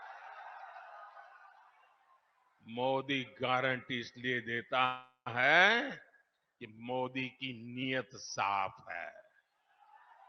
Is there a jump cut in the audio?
no; 0 cuts

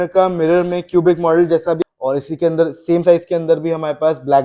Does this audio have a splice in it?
yes; 1 cut; at 1.8 s

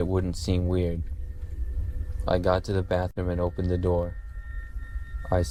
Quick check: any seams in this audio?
no; 0 cuts

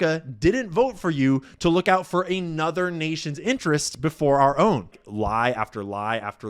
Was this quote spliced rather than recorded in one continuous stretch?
yes; 1 cut; at 5.0 s

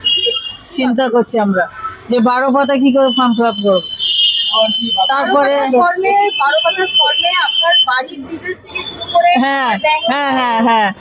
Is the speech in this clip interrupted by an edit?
no; 0 cuts

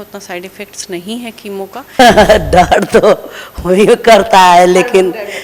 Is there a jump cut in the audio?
yes; 1 cut; at 1.9 s

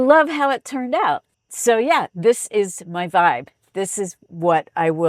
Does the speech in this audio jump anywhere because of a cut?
no; 0 cuts

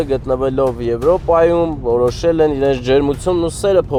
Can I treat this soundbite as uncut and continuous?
yes; 0 cuts

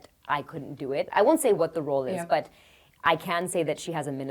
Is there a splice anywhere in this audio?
no; 0 cuts

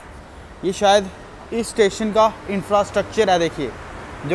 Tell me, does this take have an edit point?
no; 0 cuts

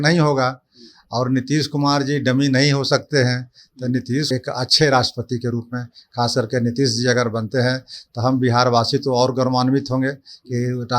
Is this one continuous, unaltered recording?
no; 1 cut; at 4.3 s

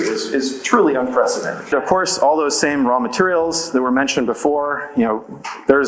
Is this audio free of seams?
no; 1 cut; at 1.6 s

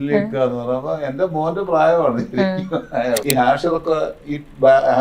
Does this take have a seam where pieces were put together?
yes; 1 cut; at 3.2 s

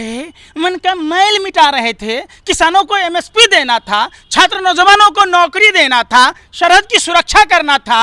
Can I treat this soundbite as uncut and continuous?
yes; 0 cuts

